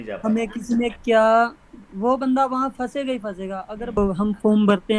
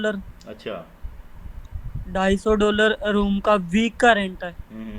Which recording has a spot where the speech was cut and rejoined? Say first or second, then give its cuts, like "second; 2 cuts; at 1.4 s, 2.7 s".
first; 1 cut; at 4.0 s